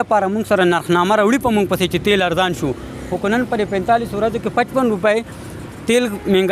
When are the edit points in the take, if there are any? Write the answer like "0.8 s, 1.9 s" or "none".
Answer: none